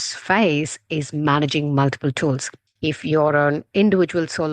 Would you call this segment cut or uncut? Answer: cut